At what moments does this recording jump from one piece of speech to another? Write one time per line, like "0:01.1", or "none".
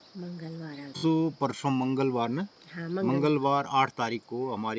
0:00.9